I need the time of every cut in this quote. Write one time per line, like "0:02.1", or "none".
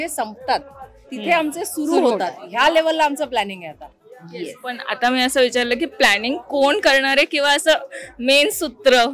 none